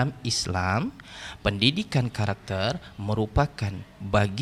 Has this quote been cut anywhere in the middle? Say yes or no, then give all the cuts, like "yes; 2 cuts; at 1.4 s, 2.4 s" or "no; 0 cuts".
no; 0 cuts